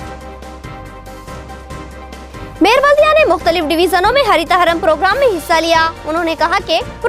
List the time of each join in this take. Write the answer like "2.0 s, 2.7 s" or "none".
none